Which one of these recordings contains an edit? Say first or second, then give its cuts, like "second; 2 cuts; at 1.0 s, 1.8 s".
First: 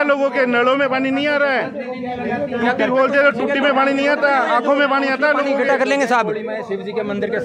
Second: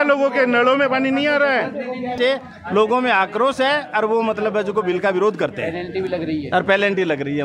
second; 1 cut; at 2.1 s